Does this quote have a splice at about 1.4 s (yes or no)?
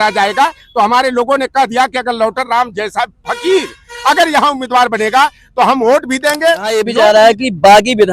no